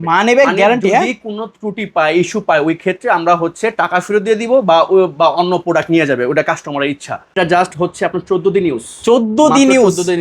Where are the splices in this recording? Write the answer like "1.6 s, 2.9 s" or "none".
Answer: 7.3 s